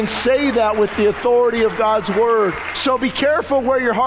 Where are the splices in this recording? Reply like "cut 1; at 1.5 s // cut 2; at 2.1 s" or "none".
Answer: cut 1; at 2.7 s